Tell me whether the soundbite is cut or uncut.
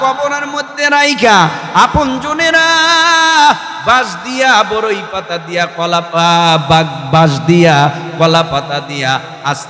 uncut